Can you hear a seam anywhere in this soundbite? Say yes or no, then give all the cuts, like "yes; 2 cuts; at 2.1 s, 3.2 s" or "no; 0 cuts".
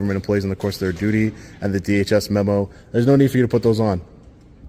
no; 0 cuts